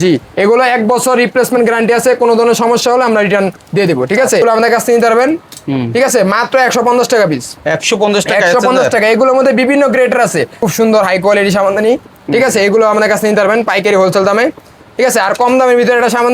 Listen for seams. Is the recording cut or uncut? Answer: cut